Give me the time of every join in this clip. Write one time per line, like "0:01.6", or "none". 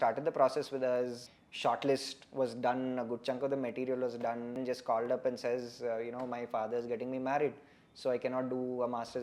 0:01.2
0:04.6